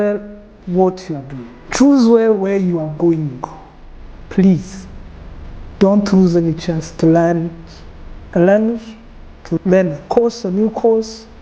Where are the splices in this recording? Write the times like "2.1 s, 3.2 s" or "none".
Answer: 4.2 s, 6.9 s, 9.6 s